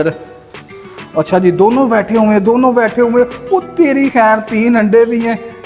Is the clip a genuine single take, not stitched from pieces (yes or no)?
yes